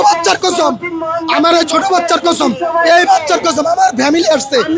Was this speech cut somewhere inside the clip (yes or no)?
no